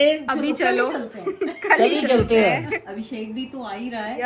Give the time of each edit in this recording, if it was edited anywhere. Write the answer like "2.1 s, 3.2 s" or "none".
2.8 s